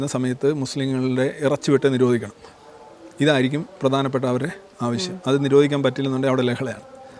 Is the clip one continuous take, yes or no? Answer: yes